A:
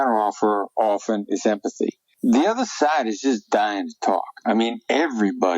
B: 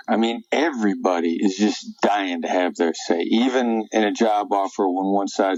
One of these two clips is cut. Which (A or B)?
A